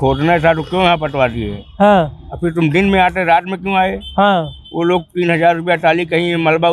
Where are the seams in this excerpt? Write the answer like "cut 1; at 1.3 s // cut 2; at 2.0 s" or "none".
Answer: none